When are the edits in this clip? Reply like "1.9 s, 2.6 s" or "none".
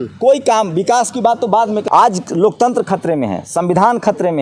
1.8 s